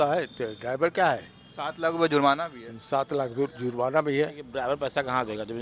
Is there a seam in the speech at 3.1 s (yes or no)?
no